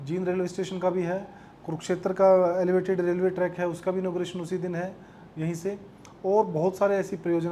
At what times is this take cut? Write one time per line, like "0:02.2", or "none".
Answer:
none